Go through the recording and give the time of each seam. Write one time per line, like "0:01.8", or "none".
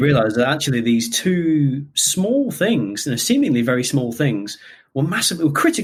none